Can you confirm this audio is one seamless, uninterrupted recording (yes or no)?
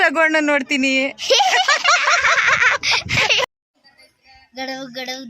no